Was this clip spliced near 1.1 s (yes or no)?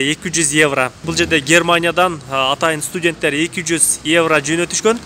yes